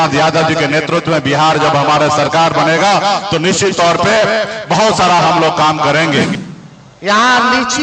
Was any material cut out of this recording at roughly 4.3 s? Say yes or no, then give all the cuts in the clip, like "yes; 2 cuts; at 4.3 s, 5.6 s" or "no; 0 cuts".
no; 1 cut; at 6.4 s